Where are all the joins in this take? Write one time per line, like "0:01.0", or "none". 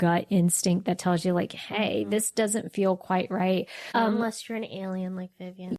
0:03.8